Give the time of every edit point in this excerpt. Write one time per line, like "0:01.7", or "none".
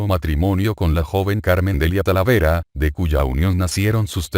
0:00.9

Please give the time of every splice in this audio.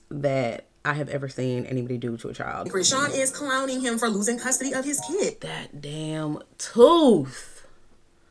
0:02.7

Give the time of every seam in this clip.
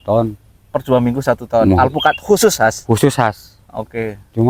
none

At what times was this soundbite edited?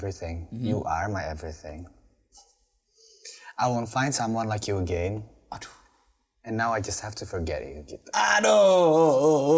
none

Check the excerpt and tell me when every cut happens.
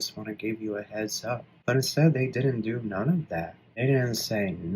0:01.5
0:03.6

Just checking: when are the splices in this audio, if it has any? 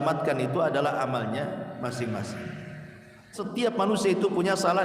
0:03.4

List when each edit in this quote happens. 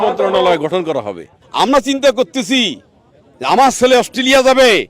0:01.4

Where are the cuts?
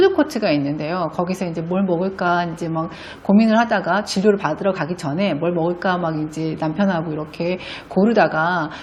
none

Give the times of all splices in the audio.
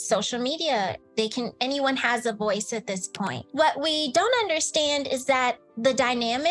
0:03.4

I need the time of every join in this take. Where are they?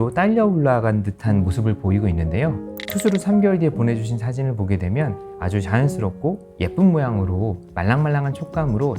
0:02.7

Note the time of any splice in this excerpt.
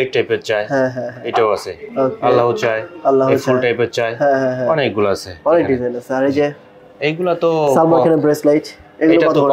none

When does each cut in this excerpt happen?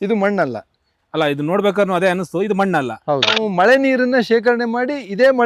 0:03.4

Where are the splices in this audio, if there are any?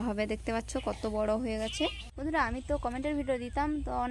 0:02.1

